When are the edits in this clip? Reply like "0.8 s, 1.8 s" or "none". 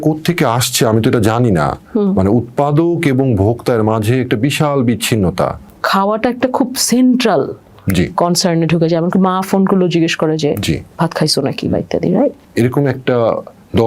5.7 s, 12.4 s